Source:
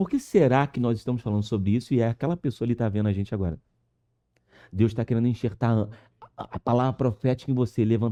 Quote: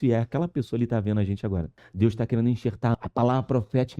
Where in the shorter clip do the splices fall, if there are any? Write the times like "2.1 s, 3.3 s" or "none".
1.8 s, 2.9 s